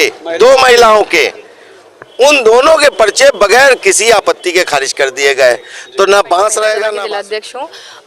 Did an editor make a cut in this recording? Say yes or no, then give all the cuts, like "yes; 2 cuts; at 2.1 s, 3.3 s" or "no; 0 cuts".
yes; 1 cut; at 6.9 s